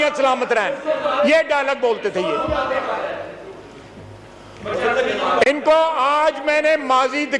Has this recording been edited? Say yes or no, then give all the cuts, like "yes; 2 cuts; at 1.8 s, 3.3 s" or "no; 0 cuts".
no; 0 cuts